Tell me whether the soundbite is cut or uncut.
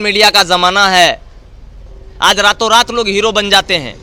uncut